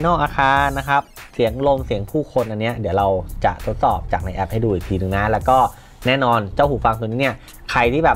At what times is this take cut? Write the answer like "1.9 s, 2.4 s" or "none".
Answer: none